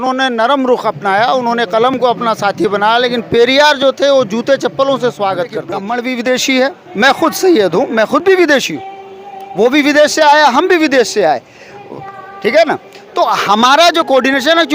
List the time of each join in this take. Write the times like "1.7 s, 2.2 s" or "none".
5.8 s